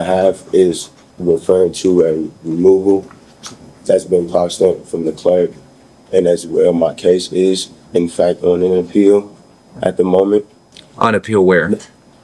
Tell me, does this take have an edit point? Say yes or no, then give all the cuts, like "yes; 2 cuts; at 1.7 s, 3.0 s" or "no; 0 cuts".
no; 0 cuts